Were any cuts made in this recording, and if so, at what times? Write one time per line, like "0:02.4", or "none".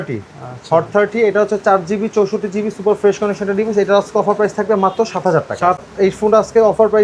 0:05.8